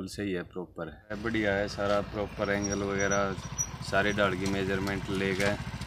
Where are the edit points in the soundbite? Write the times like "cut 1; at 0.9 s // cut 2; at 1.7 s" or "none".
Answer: cut 1; at 1.2 s